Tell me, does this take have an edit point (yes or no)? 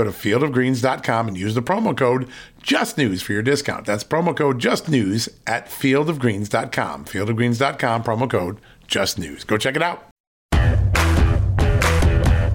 yes